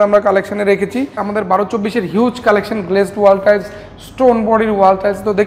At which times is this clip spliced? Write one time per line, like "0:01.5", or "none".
0:01.2